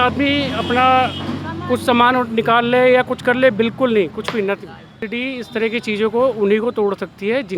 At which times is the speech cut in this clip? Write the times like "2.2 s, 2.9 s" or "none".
5.1 s